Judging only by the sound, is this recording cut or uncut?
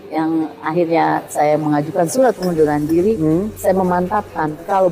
cut